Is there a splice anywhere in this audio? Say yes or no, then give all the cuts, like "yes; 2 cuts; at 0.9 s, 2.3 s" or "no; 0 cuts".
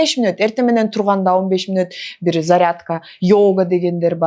no; 0 cuts